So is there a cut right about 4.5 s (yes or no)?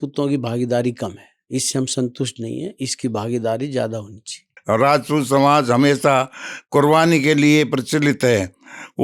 yes